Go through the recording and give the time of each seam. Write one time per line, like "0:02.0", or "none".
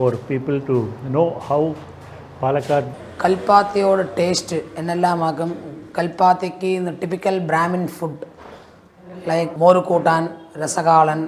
0:03.0

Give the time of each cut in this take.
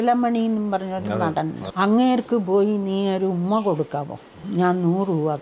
0:01.6
0:04.4

